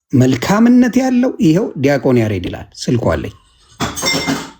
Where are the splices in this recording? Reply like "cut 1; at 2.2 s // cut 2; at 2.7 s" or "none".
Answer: none